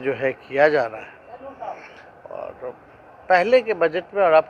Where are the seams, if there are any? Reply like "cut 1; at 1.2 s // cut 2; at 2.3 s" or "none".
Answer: none